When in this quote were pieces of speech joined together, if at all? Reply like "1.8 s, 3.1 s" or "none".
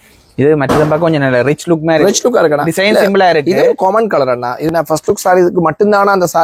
4.7 s